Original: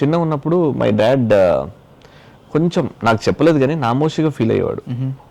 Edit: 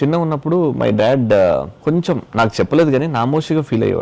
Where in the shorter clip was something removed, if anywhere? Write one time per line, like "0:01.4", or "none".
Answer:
0:01.7